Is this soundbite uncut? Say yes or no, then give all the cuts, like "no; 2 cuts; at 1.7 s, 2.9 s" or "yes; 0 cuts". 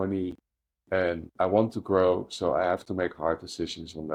yes; 0 cuts